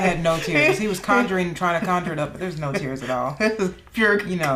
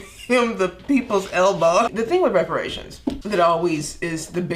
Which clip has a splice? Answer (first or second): second